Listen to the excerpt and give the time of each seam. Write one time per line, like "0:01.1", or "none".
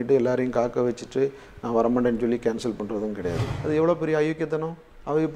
0:03.5

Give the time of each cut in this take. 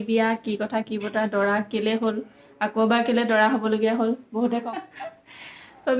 0:04.6

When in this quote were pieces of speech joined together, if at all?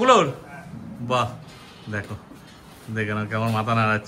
none

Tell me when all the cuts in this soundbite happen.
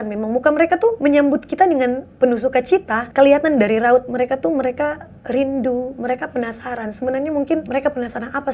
0:01.0
0:03.0
0:07.7

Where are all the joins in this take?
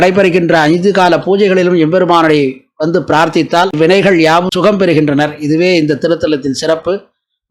none

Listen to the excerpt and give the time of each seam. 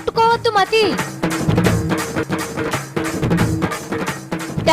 0:02.2

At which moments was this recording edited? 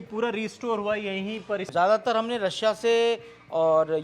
0:01.6

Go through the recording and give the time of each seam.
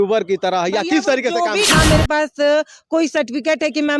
0:01.7

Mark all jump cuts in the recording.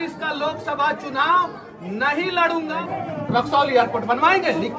0:02.7

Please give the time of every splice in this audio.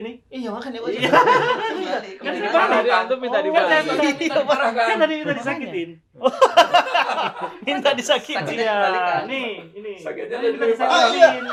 none

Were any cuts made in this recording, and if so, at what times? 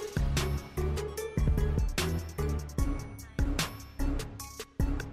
none

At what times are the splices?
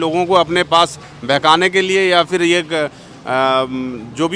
none

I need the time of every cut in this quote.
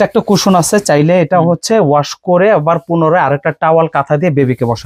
none

